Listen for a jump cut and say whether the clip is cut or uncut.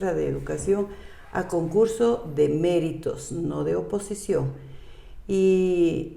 uncut